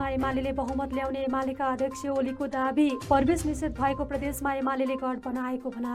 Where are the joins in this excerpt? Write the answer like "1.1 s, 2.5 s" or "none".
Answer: none